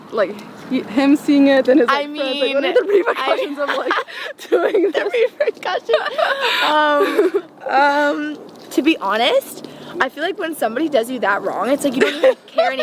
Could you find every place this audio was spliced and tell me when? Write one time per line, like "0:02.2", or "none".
none